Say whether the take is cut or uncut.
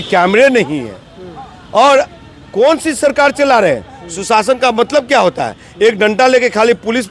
uncut